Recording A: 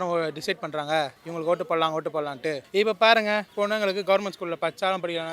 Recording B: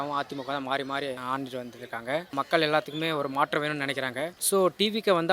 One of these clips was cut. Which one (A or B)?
B